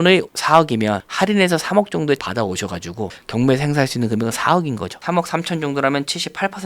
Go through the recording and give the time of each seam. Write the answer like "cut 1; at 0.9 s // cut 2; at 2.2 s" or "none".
cut 1; at 3.2 s // cut 2; at 5.0 s